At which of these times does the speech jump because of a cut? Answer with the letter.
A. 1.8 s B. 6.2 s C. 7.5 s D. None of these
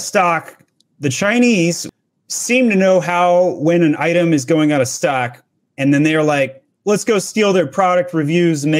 A